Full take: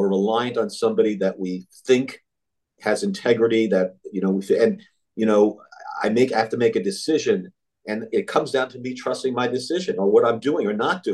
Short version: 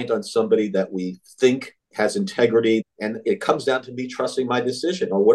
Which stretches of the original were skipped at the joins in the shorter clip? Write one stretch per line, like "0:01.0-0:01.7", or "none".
0:02.2-0:02.6
0:03.7-0:07.7